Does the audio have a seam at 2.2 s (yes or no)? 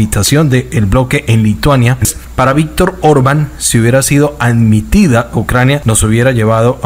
yes